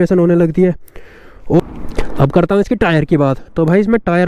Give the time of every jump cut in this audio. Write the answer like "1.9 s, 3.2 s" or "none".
1.6 s